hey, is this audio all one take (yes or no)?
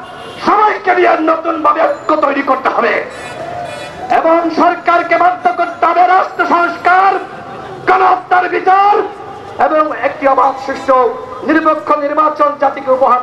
yes